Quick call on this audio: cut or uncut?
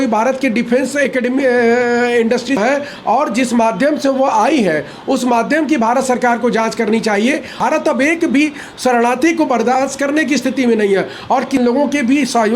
cut